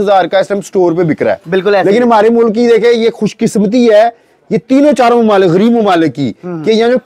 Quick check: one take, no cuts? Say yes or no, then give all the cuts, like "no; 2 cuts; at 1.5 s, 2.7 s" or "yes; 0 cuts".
yes; 0 cuts